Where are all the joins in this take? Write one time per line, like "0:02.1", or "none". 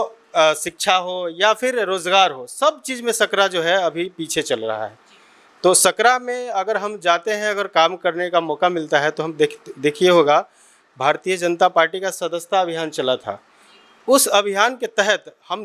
none